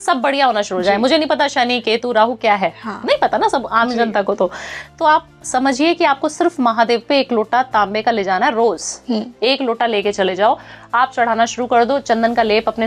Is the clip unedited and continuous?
yes; 0 cuts

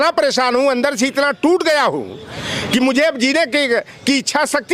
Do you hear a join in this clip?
no; 0 cuts

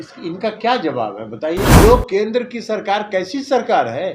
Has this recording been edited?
yes; 1 cut; at 1.7 s

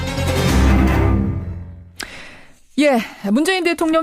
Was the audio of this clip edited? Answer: yes; 1 cut; at 1.9 s

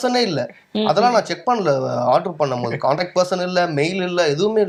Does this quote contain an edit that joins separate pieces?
no; 0 cuts

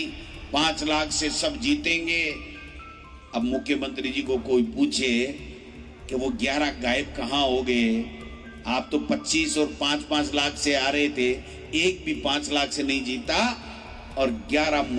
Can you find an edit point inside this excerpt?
no; 0 cuts

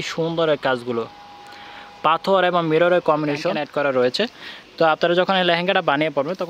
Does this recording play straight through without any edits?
no; 1 cut; at 3.2 s

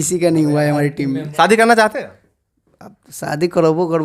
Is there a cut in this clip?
yes; 1 cut; at 1.3 s

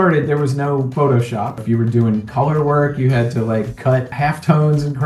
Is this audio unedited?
no; 3 cuts; at 0.9 s, 1.6 s, 4.1 s

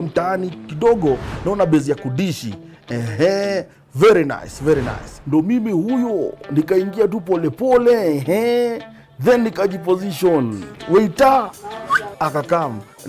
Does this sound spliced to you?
yes; 1 cut; at 1.0 s

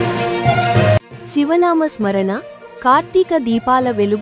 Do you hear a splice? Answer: yes; 1 cut; at 1.1 s

